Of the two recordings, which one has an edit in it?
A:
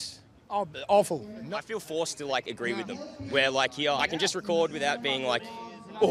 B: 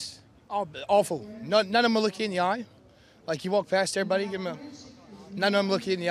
A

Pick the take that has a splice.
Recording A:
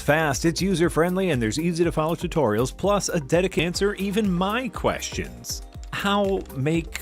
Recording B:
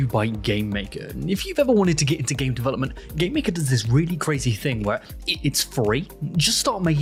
A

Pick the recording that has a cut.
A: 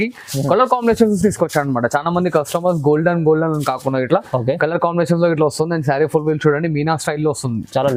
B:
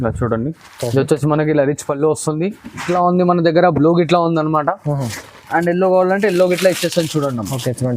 B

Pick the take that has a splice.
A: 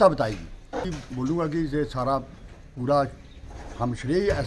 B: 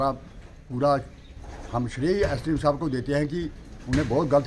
A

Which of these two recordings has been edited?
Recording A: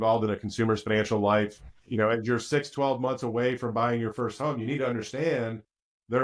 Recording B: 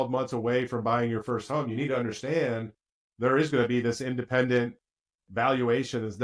A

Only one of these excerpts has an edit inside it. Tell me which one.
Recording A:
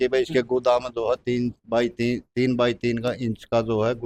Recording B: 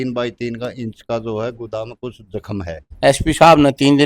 B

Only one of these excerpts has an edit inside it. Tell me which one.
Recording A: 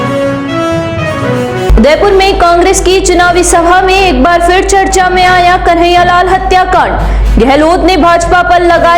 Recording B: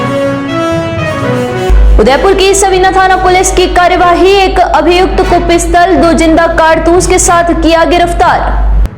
B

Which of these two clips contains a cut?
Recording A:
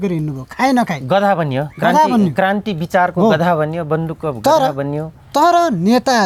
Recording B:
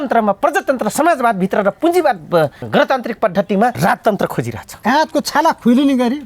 B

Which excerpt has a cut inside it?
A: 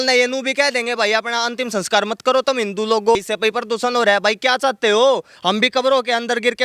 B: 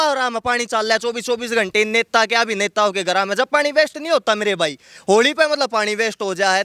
A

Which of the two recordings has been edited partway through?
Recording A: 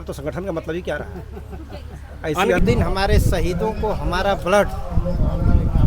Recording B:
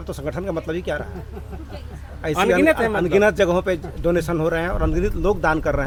A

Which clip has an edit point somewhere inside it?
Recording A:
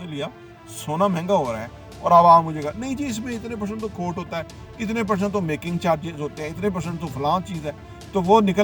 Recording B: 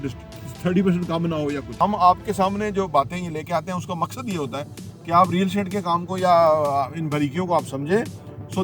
B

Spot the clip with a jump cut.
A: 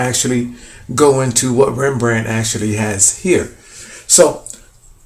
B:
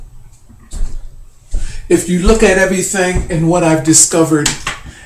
B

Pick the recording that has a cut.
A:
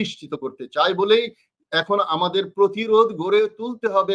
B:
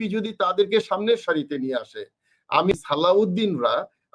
B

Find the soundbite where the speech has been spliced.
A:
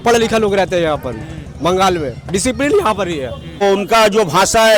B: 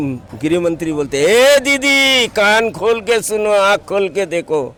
A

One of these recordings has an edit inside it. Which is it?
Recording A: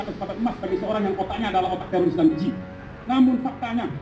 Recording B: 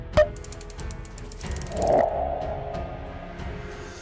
B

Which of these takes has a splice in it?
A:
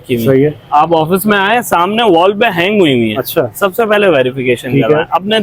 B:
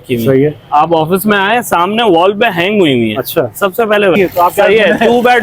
B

